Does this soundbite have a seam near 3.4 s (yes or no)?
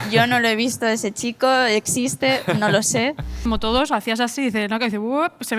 yes